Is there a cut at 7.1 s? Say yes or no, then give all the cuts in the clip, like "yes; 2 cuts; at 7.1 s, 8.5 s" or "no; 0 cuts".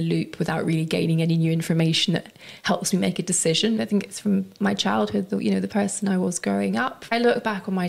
yes; 2 cuts; at 3.8 s, 7.1 s